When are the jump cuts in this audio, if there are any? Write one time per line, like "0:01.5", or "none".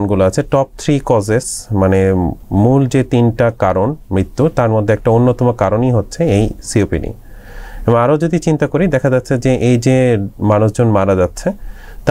none

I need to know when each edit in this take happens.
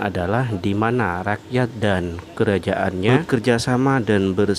0:03.1

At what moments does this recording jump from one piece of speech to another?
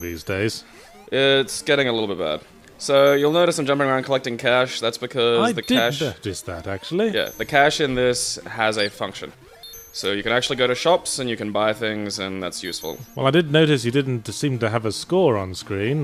0:12.7

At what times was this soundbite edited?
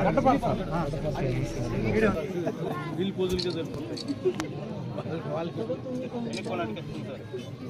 0:02.6

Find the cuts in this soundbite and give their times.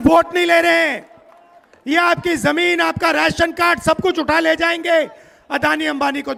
none

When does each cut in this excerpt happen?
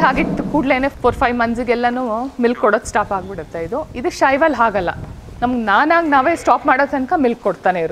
0:00.9

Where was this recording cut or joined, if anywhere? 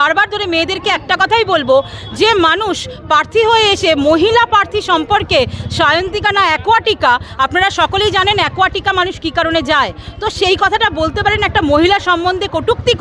none

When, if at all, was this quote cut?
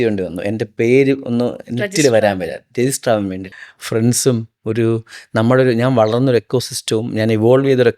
0:03.5

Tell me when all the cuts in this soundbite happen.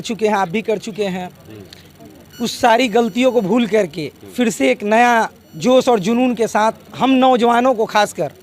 0:05.4

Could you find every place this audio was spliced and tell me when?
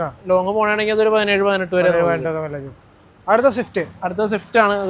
none

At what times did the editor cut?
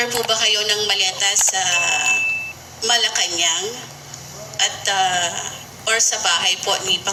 none

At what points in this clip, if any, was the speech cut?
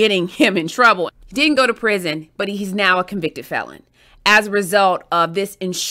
0:01.1

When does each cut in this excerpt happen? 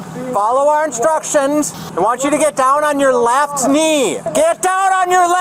0:01.8
0:04.3

